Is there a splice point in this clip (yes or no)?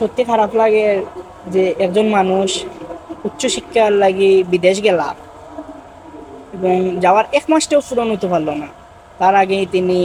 no